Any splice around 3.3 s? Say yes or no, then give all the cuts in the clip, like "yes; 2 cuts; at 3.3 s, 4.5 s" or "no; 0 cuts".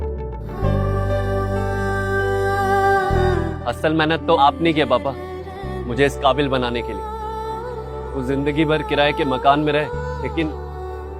yes; 1 cut; at 3.3 s